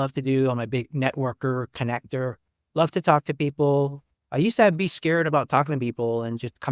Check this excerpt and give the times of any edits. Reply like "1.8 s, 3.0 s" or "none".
none